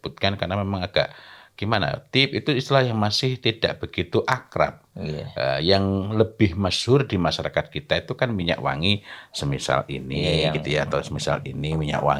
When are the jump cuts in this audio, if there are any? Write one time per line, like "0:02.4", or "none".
none